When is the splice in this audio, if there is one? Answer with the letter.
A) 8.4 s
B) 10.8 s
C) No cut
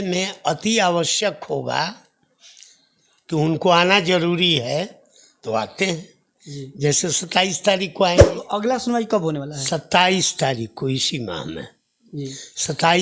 A